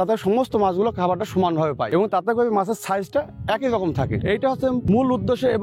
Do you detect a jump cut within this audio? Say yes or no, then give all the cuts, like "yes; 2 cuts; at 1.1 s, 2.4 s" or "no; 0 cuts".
yes; 2 cuts; at 1.8 s, 4.1 s